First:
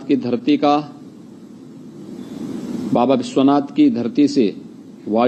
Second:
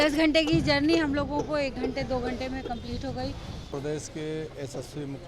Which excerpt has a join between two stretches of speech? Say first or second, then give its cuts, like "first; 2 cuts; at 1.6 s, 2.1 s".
second; 1 cut; at 3.7 s